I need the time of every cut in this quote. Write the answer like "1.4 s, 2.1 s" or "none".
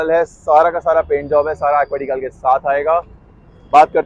none